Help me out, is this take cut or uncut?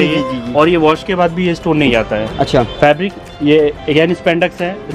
uncut